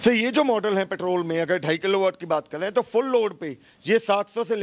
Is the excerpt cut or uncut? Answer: uncut